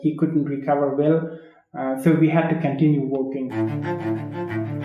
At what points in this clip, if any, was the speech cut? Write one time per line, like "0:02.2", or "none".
0:03.5